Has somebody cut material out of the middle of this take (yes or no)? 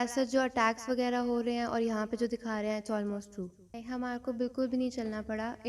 yes